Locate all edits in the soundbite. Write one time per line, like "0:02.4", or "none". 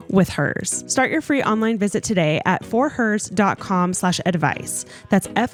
none